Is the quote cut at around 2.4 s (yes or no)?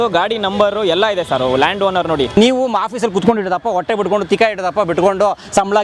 yes